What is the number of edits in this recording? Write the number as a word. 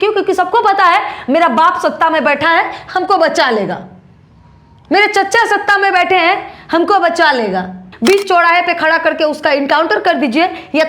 one